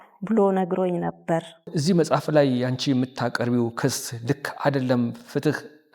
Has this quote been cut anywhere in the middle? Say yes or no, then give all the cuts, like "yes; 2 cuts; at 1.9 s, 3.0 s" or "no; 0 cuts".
yes; 1 cut; at 1.7 s